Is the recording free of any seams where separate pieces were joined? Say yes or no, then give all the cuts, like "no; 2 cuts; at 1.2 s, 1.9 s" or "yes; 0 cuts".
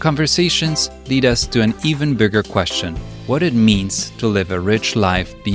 yes; 0 cuts